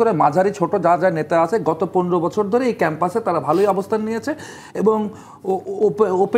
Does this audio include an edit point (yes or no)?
no